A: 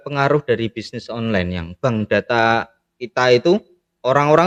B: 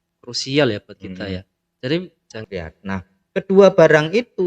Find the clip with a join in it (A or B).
B